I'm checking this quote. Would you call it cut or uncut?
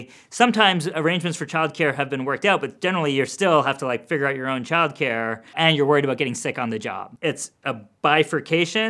cut